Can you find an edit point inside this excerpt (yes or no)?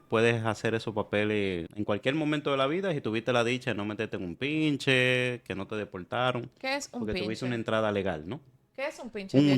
yes